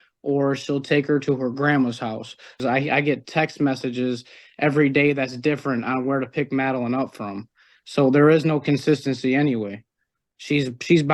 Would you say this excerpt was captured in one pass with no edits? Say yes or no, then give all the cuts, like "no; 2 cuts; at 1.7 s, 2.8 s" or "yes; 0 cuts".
no; 1 cut; at 2.6 s